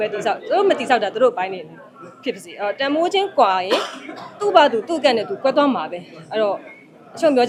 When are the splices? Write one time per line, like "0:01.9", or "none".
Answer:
none